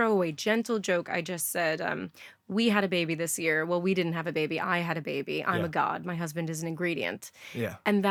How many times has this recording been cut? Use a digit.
0